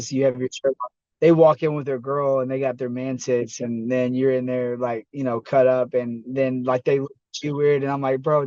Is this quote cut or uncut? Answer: uncut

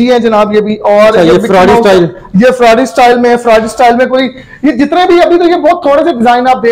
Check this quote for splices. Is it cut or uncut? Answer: uncut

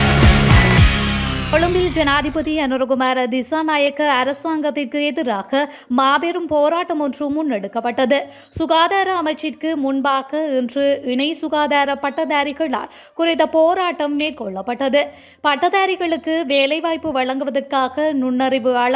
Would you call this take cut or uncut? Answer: cut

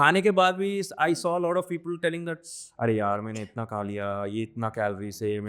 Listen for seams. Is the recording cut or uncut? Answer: uncut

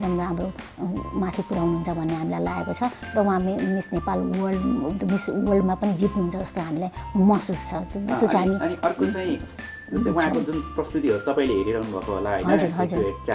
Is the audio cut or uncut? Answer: uncut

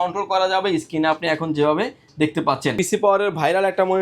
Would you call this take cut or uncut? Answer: cut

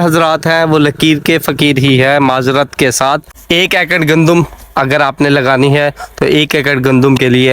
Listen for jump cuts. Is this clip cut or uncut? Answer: cut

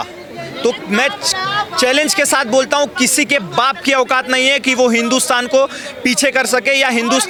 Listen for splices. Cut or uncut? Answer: uncut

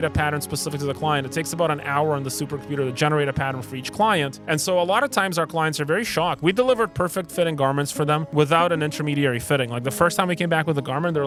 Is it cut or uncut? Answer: uncut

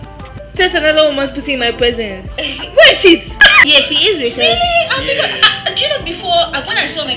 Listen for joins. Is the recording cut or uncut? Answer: cut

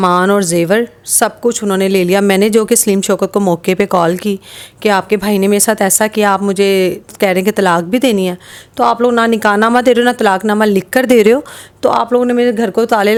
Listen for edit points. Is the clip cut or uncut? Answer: uncut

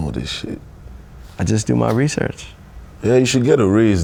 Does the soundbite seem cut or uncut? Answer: uncut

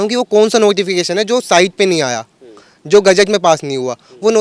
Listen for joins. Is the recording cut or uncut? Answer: uncut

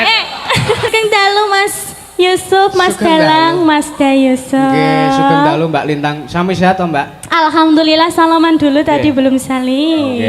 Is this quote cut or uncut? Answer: cut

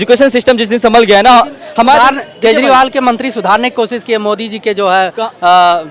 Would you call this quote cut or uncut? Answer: uncut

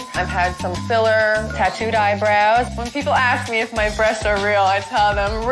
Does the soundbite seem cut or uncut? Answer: uncut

